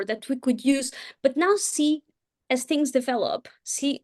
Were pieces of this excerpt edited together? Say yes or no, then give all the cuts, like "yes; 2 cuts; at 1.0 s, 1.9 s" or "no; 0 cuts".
yes; 1 cut; at 1.1 s